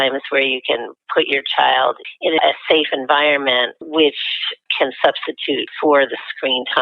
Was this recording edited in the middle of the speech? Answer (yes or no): yes